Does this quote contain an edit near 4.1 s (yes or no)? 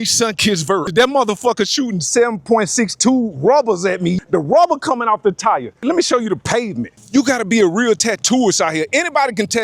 yes